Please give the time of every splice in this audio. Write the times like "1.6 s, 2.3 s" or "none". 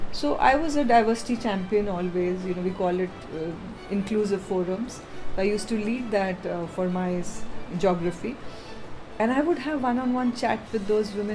none